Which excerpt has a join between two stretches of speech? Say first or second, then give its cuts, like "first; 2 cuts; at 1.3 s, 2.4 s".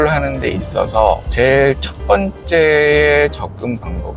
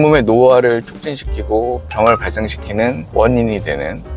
second; 1 cut; at 3.0 s